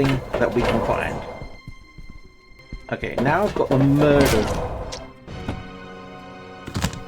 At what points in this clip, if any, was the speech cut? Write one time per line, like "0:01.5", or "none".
0:02.6

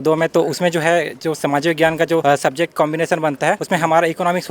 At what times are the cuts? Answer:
0:02.2
0:03.6

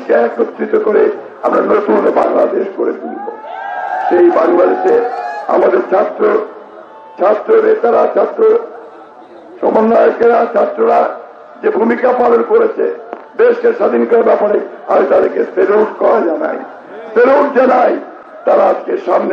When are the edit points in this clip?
none

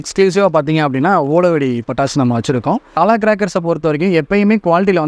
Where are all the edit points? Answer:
0:02.9

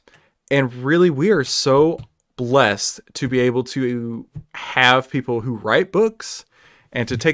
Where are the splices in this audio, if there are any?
none

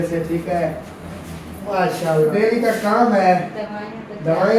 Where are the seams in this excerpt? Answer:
0:02.3

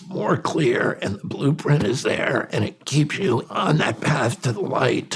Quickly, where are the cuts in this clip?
0:03.5

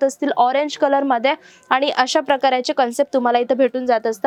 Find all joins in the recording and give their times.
none

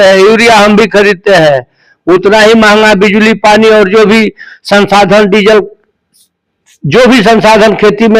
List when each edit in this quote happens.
none

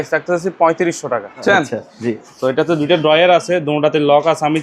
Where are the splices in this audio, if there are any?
0:01.4

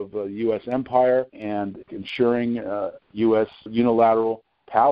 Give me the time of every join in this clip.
0:01.8
0:03.7

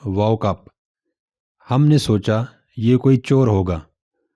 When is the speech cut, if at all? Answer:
none

